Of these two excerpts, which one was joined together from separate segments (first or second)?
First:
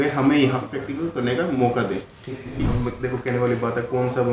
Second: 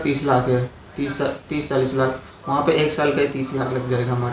first